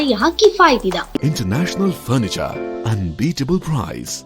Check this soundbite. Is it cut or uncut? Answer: cut